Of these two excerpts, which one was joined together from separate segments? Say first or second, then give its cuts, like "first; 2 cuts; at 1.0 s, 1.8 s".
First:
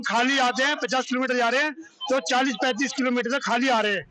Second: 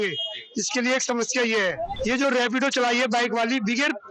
second; 1 cut; at 1.9 s